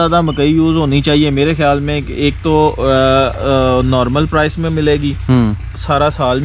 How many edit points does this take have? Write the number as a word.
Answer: zero